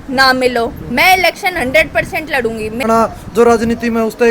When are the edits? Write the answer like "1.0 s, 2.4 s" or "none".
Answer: 2.8 s